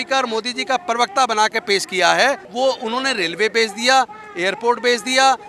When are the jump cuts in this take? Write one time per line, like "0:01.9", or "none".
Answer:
0:02.5